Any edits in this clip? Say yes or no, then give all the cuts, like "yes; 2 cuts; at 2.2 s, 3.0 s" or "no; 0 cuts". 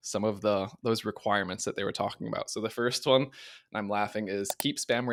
no; 0 cuts